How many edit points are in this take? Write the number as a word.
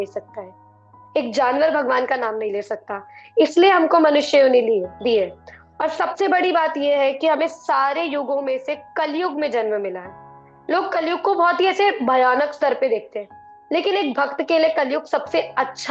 zero